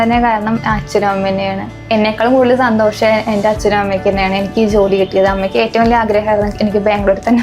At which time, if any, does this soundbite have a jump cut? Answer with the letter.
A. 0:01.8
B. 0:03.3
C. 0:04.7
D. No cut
A